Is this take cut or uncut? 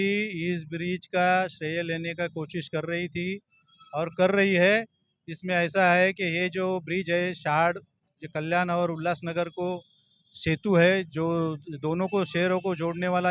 uncut